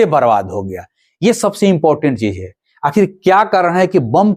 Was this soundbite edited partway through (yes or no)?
no